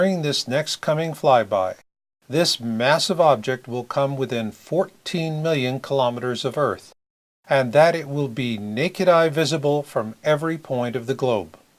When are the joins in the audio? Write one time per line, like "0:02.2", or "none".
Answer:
0:05.8